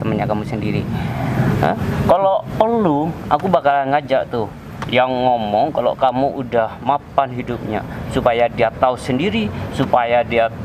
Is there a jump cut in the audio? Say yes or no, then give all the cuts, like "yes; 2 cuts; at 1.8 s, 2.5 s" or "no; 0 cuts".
no; 0 cuts